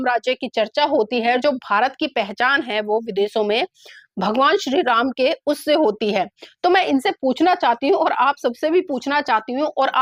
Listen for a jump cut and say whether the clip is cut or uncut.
uncut